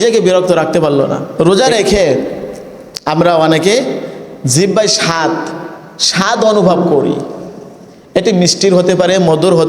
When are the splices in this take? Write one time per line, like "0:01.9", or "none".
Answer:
0:01.3

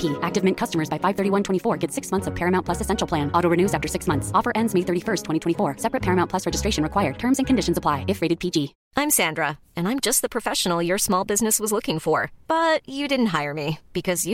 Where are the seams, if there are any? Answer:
0:08.8

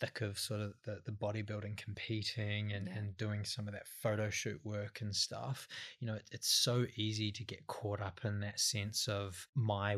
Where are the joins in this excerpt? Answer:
none

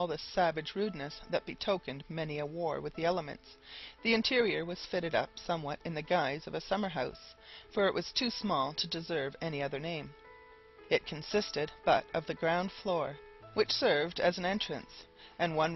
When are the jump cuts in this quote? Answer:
0:06.5

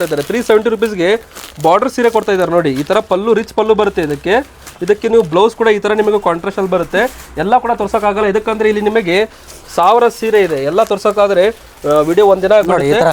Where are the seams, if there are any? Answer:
none

